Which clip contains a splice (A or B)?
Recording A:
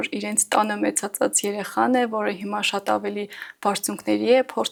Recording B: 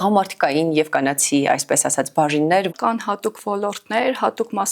B